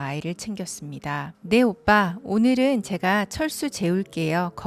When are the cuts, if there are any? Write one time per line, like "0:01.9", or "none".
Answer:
0:01.3